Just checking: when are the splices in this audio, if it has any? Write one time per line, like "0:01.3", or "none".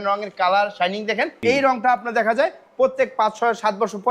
0:01.3